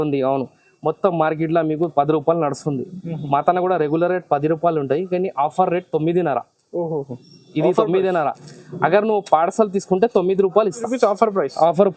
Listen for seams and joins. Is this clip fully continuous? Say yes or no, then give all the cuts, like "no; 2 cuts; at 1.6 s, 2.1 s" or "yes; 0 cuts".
no; 1 cut; at 10.9 s